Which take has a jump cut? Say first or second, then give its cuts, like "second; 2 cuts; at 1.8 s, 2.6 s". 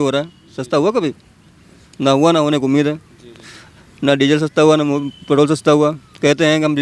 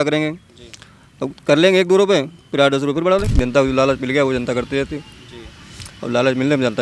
second; 1 cut; at 3.3 s